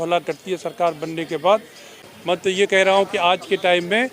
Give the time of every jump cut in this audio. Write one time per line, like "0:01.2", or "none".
0:02.0